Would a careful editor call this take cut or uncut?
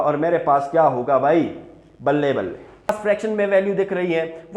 cut